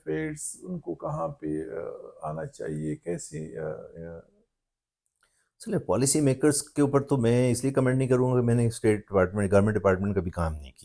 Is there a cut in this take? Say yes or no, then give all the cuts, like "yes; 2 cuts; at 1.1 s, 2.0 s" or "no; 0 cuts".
no; 0 cuts